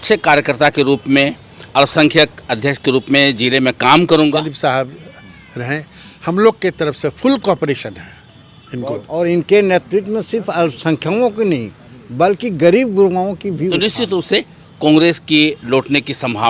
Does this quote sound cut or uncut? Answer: cut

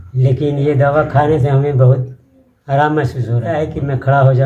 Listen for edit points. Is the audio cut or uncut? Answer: cut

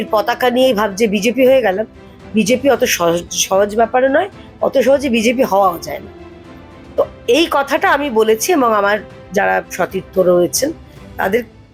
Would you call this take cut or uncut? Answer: uncut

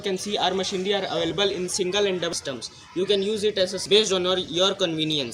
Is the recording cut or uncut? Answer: cut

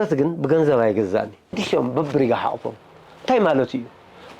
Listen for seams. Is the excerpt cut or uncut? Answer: cut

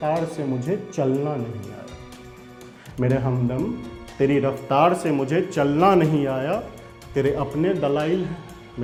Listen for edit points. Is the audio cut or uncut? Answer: uncut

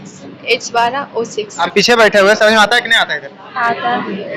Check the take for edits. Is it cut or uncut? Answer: cut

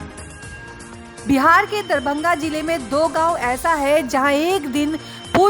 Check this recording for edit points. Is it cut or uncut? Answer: cut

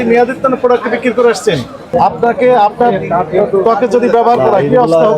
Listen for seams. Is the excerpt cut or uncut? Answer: cut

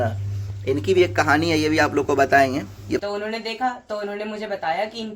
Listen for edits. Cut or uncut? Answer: cut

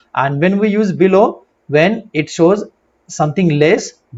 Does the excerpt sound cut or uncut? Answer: uncut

